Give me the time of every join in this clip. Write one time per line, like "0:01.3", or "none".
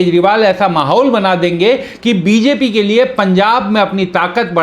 none